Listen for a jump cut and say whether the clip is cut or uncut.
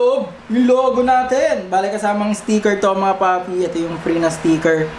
uncut